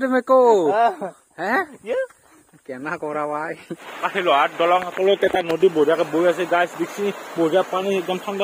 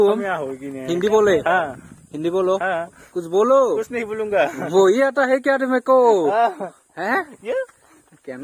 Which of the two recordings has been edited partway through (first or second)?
first